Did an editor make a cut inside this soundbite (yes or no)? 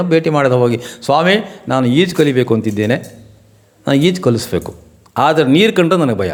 no